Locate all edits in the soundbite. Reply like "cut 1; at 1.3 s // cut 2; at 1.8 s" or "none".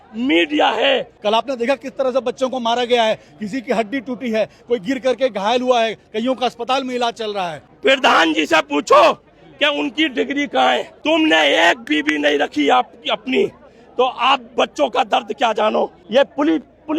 cut 1; at 1.1 s // cut 2; at 7.7 s // cut 3; at 10.9 s // cut 4; at 16.0 s